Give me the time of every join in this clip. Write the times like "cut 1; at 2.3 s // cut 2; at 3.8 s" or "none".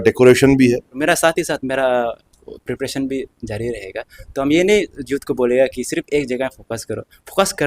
cut 1; at 1.0 s